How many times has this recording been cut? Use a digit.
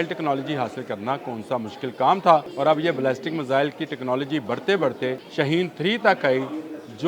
2